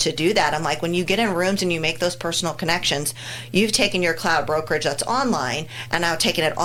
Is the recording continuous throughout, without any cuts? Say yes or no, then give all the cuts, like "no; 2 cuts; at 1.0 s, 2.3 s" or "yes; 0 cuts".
yes; 0 cuts